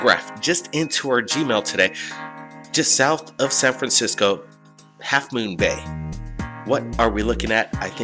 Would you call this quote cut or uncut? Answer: cut